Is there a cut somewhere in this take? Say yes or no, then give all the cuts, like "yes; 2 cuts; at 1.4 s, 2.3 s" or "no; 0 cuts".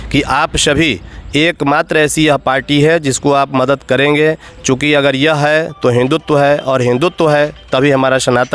no; 0 cuts